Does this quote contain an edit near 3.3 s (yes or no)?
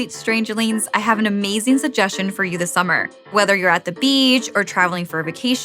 yes